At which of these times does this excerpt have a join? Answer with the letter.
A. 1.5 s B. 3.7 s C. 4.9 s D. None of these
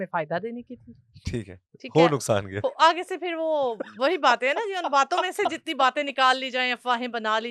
D